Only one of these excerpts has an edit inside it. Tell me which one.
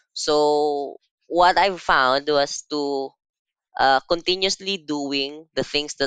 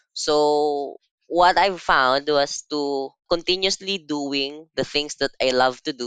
second; 1 cut; at 3.2 s

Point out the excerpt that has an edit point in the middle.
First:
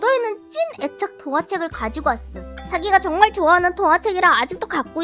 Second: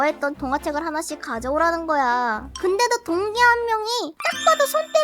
second; 2 cuts; at 2.5 s, 4.1 s

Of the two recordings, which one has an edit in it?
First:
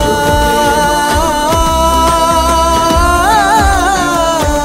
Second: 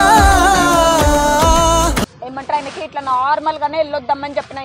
second; 1 cut; at 2.3 s

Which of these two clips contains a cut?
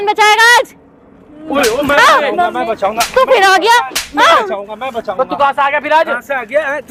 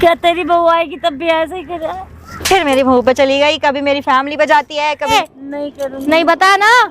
second; 1 cut; at 5.1 s

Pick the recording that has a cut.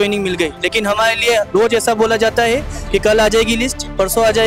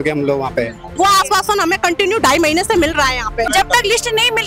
second; 2 cuts; at 0.9 s, 3.5 s

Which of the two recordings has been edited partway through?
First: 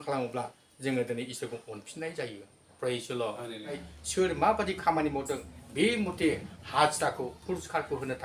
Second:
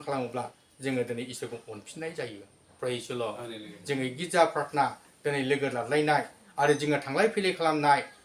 first; 1 cut; at 3.8 s

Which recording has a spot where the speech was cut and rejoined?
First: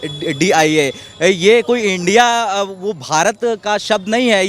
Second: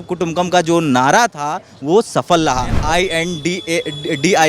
second; 1 cut; at 2.7 s

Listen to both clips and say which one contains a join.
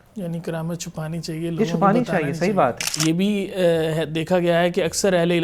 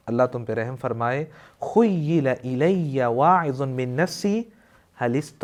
first; 1 cut; at 2.9 s

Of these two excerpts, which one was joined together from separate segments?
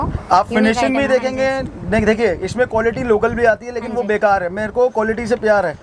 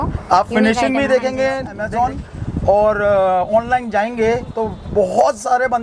second; 1 cut; at 1.8 s

